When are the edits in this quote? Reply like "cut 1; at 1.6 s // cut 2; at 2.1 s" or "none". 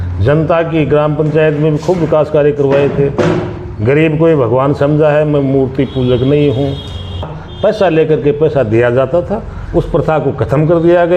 cut 1; at 7.4 s